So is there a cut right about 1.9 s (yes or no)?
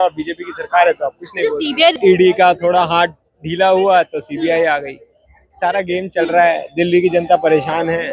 yes